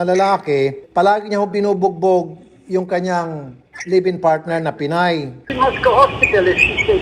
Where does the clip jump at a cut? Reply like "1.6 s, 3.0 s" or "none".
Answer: 5.3 s